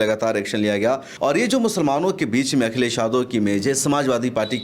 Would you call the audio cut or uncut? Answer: cut